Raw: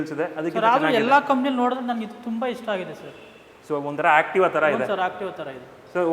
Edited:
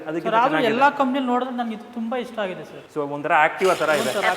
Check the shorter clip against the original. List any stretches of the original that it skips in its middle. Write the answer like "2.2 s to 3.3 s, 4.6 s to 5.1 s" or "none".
3.0 s to 3.5 s